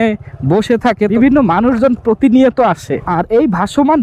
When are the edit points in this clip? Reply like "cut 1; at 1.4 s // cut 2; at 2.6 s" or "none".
cut 1; at 1.1 s // cut 2; at 3.0 s